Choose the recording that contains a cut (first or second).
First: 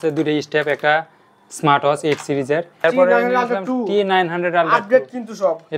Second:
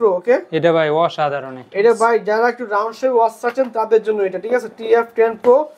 first